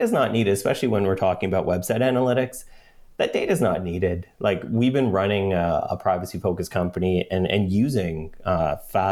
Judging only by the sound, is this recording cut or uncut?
uncut